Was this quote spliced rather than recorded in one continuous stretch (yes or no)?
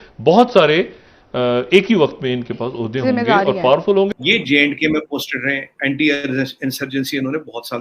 yes